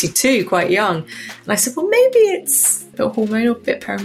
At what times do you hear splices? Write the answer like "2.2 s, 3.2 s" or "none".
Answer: 2.9 s

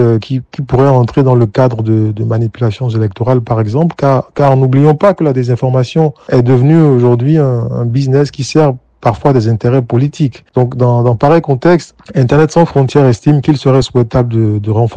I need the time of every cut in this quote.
none

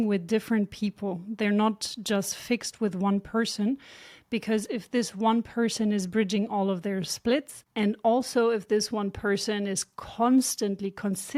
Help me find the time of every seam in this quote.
none

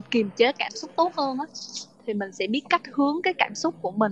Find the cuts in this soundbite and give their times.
none

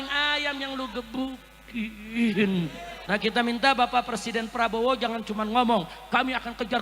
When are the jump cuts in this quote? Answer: 2.9 s

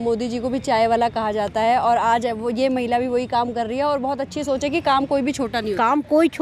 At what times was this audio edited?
none

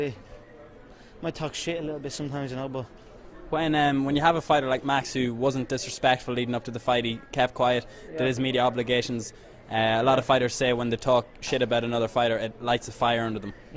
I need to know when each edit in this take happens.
10.7 s

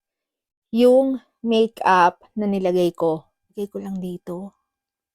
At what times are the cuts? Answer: 3.5 s

